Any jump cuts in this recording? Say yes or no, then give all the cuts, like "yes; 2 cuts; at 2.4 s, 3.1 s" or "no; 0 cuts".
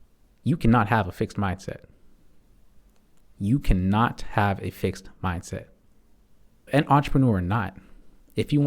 yes; 1 cut; at 6.7 s